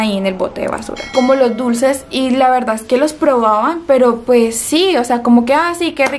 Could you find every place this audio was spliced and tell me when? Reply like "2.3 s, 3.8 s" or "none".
1.1 s